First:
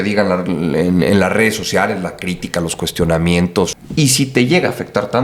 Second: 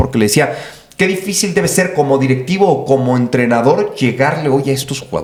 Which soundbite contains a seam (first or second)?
first